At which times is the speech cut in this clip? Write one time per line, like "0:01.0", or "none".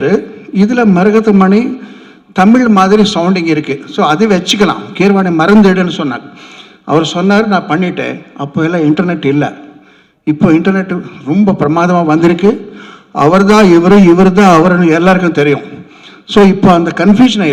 none